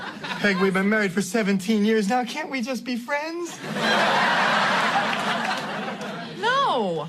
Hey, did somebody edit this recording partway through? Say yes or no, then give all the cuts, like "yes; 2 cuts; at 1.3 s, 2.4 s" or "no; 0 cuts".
yes; 1 cut; at 6.0 s